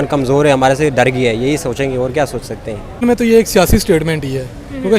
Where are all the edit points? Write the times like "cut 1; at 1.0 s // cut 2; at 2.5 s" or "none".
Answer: cut 1; at 3.0 s